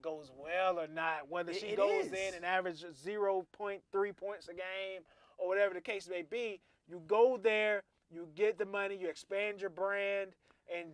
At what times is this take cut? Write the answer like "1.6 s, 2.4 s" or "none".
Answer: none